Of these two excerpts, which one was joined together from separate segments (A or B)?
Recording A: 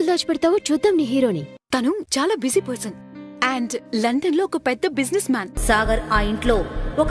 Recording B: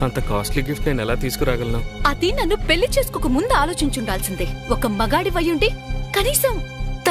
A